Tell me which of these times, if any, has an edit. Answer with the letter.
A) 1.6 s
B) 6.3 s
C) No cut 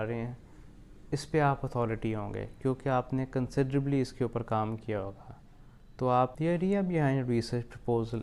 B